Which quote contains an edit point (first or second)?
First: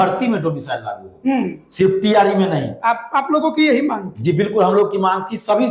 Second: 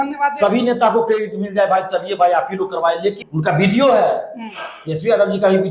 second